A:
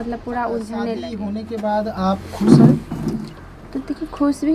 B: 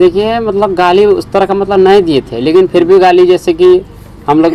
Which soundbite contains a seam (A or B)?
A